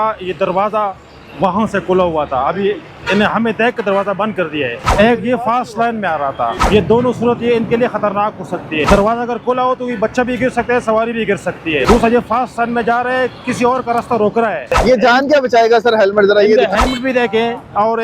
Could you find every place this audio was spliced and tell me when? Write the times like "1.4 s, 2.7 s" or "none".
4.8 s, 6.6 s, 8.9 s, 11.8 s, 14.8 s